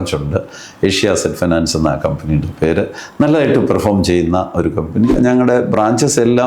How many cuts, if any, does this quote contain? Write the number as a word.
one